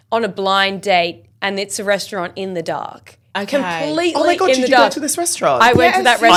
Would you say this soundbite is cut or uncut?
uncut